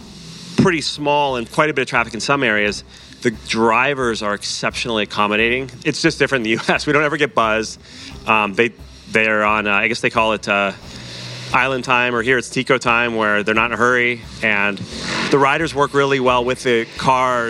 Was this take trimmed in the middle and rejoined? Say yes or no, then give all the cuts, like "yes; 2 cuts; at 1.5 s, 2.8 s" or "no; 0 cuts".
yes; 3 cuts; at 1.5 s, 5.7 s, 15.2 s